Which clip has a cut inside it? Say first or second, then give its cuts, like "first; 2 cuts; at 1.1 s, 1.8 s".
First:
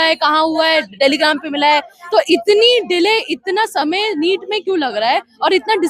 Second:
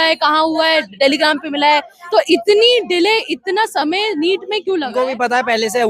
second; 1 cut; at 5.0 s